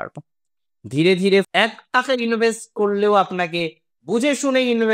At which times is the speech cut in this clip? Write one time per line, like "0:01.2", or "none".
0:01.5